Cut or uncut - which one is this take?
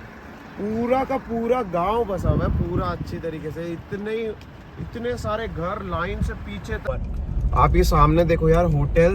cut